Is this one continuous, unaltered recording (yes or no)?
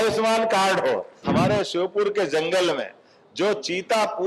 no